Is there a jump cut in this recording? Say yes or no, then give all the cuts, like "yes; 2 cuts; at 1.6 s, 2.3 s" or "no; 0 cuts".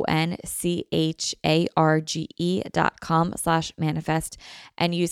no; 0 cuts